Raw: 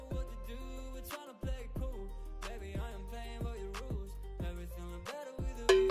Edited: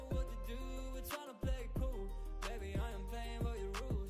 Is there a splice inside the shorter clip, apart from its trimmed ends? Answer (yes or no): no